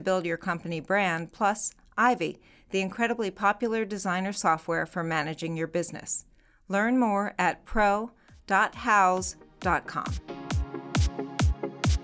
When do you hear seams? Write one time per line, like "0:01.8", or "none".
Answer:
0:10.0